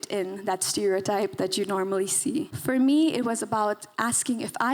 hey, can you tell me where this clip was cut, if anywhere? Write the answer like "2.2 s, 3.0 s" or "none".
2.5 s